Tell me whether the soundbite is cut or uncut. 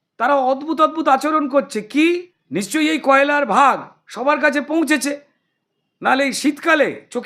cut